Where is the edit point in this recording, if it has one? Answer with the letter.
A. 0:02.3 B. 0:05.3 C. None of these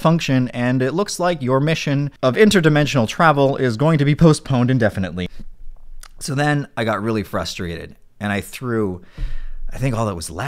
B